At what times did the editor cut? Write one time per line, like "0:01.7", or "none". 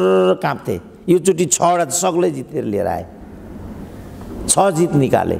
none